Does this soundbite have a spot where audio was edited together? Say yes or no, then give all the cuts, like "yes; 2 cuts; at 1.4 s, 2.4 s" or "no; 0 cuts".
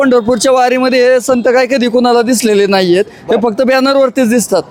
no; 0 cuts